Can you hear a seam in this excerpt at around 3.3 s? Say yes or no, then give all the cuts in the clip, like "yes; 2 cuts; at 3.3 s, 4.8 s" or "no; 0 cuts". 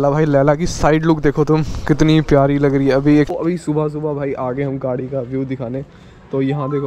yes; 1 cut; at 3.3 s